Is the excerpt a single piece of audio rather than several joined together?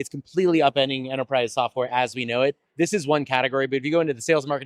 yes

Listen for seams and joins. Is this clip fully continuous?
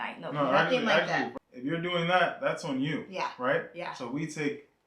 no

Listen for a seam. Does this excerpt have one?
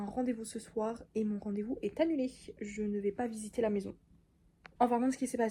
no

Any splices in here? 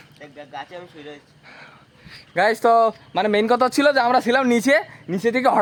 no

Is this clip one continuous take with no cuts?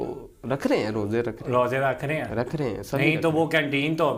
yes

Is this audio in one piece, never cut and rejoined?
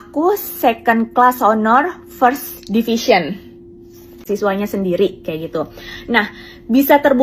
no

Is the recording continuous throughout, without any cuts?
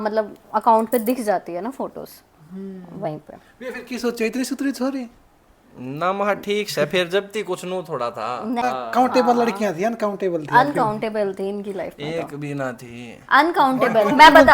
no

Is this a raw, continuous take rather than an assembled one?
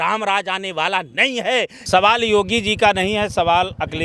no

